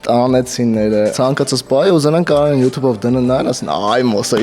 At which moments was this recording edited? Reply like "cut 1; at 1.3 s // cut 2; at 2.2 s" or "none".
cut 1; at 1.1 s